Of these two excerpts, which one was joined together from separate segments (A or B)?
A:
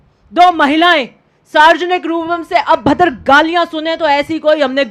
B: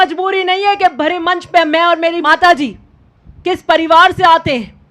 B